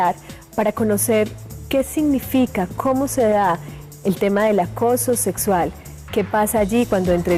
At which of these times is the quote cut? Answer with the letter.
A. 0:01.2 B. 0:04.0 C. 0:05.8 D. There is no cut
D